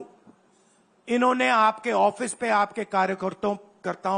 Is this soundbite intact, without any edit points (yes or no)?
yes